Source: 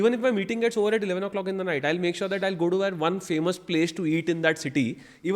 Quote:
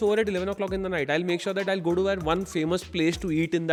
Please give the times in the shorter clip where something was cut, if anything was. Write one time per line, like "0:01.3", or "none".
none